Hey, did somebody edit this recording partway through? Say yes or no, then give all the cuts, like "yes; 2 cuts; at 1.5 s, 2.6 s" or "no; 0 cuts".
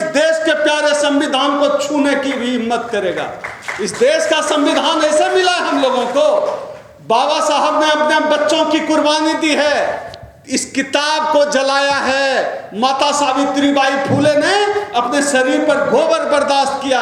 no; 0 cuts